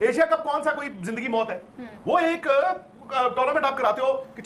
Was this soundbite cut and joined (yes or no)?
no